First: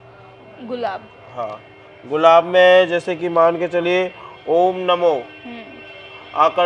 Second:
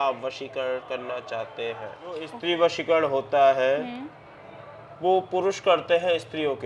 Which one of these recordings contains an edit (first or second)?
second